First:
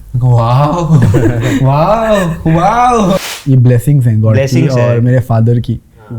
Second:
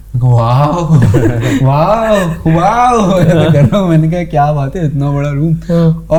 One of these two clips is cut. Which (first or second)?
first